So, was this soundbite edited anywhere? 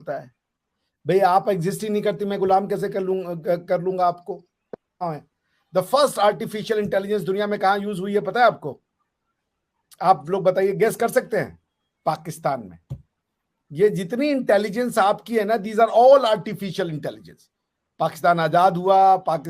yes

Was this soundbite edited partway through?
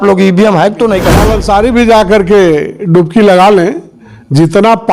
yes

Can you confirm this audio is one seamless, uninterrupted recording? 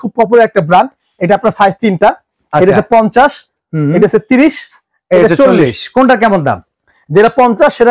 yes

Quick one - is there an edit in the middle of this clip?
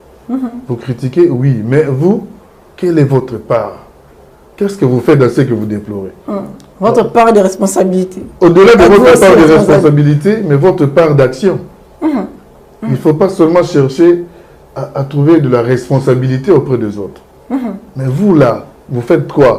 no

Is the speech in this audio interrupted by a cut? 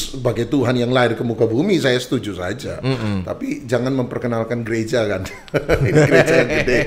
no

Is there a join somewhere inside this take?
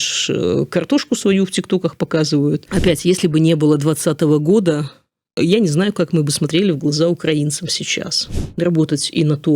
yes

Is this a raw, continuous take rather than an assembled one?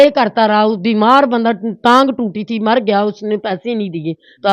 yes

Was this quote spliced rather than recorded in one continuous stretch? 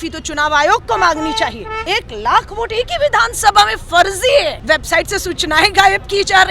yes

